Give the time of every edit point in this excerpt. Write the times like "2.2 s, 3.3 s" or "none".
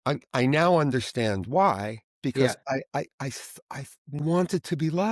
2.5 s, 4.2 s